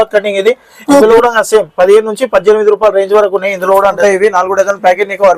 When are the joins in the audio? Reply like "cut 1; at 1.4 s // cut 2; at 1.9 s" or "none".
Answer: cut 1; at 1.1 s // cut 2; at 4.0 s

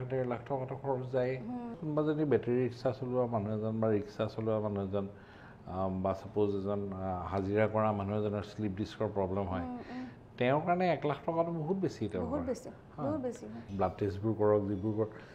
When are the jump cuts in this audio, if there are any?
cut 1; at 1.8 s // cut 2; at 13.6 s

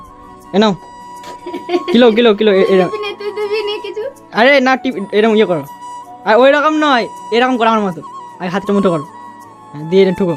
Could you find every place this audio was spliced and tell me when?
none

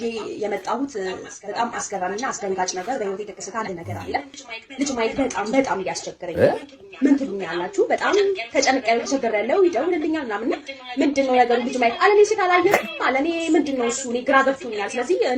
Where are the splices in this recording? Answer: cut 1; at 4.4 s

